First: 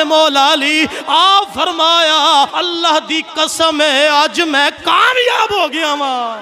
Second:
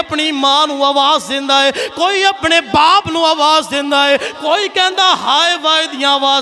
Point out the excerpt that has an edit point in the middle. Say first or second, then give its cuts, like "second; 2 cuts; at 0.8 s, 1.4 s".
first; 1 cut; at 2.5 s